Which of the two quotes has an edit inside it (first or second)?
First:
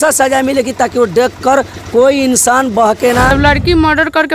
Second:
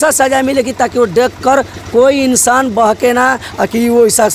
first